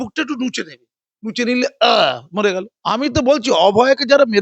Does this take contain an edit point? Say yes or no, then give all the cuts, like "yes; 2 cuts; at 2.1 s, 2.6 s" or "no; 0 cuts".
yes; 1 cut; at 2.7 s